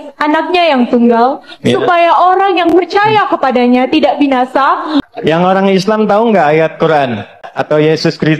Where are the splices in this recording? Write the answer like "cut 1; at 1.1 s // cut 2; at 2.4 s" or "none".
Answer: cut 1; at 5.1 s // cut 2; at 7.5 s